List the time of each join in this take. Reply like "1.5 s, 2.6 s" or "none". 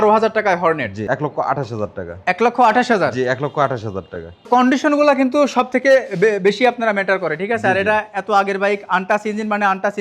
0.9 s, 4.5 s